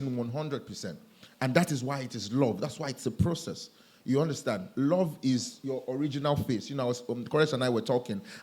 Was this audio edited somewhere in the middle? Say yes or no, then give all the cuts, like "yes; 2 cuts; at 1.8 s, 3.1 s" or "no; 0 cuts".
no; 0 cuts